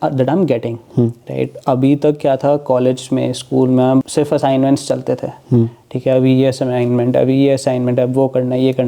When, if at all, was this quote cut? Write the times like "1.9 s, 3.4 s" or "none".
4.1 s